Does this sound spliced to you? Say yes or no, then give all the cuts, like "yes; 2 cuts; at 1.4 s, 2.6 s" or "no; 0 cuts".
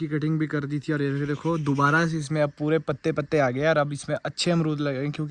no; 0 cuts